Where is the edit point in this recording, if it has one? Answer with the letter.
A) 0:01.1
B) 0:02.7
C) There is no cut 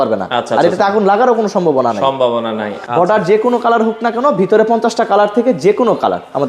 B